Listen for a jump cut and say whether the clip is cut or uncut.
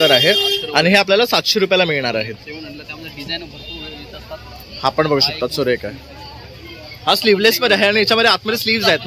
uncut